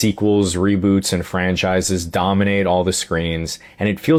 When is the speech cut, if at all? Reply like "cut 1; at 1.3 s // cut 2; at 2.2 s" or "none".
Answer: none